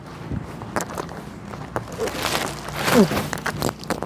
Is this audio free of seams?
yes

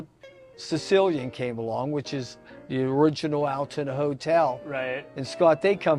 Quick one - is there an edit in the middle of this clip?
no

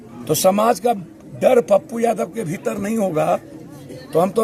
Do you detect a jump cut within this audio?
no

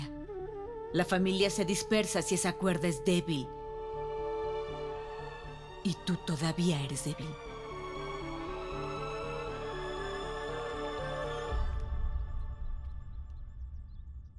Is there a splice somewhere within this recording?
no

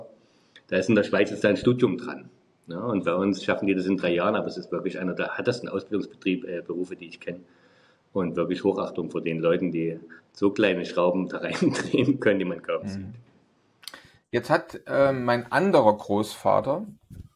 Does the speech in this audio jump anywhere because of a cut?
no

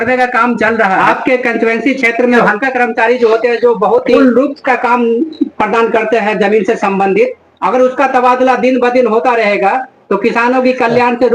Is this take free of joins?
no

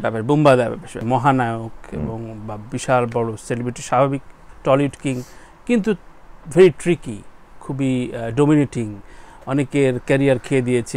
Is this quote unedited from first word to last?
no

